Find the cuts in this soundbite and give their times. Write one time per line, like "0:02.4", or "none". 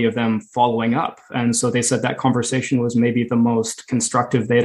none